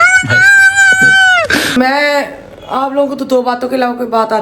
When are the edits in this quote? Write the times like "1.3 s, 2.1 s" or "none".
1.7 s